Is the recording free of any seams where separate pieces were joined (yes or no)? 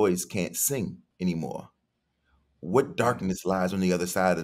no